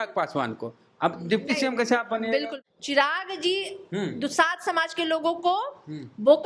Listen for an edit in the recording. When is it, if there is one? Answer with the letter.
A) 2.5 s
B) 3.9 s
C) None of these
A